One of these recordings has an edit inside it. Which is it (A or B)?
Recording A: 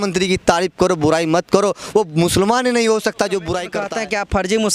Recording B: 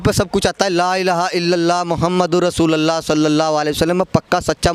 A